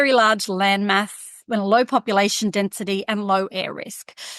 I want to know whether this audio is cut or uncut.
cut